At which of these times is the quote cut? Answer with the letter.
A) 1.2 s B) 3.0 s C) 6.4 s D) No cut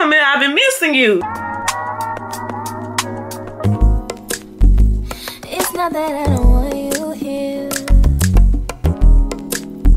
A